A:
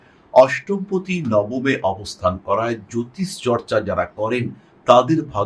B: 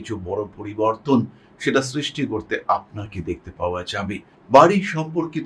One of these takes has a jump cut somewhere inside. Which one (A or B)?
B